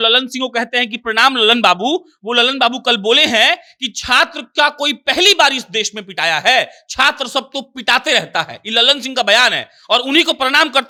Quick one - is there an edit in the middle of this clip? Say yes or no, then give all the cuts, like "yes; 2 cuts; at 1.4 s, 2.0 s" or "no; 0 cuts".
no; 0 cuts